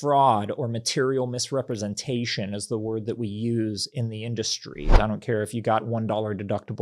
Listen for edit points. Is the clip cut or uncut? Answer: cut